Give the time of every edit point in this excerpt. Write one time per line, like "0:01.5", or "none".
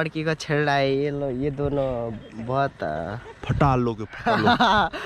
none